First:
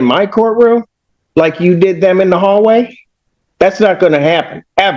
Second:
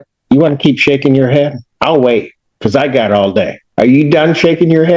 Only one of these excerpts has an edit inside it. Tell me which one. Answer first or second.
second